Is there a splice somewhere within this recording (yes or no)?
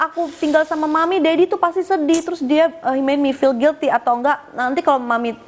no